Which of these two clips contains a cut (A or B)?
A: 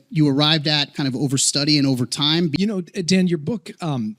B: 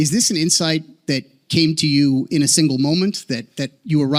A